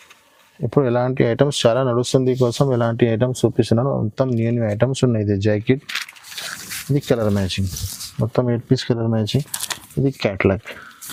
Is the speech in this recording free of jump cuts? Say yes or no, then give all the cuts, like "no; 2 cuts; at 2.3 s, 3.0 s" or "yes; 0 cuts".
yes; 0 cuts